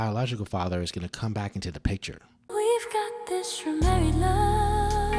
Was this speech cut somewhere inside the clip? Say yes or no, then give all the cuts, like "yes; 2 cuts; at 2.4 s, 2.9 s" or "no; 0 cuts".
yes; 1 cut; at 2.3 s